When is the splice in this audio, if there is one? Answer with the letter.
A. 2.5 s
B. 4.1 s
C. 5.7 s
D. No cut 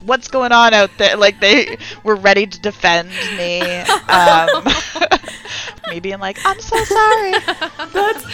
C